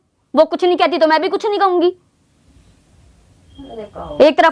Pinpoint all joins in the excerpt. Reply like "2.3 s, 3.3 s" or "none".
none